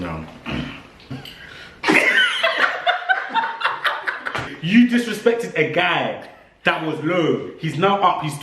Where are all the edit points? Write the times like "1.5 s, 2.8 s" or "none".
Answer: 4.5 s